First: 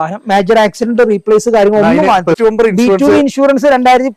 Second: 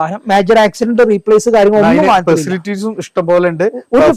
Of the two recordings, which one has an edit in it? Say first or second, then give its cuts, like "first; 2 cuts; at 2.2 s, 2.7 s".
first; 1 cut; at 2.4 s